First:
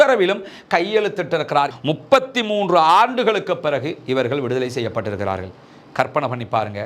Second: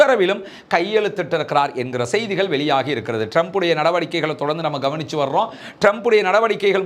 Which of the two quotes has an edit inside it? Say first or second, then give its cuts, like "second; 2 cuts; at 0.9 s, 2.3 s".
first; 1 cut; at 1.8 s